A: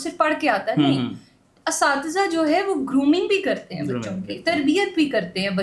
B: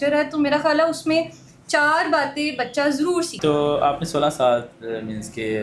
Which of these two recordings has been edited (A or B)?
B